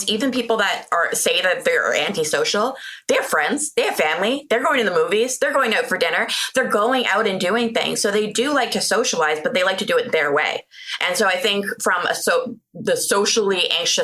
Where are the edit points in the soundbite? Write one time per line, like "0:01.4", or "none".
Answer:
none